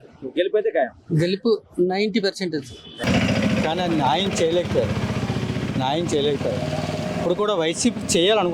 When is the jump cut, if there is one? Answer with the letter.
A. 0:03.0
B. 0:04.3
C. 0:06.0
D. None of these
A